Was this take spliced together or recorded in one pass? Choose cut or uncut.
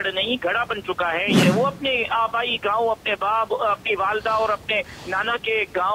cut